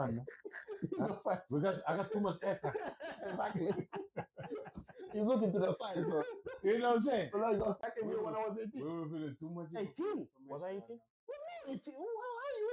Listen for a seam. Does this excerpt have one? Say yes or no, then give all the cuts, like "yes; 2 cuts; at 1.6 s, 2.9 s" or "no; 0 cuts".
yes; 1 cut; at 7.8 s